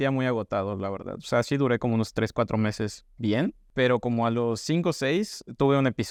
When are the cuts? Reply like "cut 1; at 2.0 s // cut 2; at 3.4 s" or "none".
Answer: none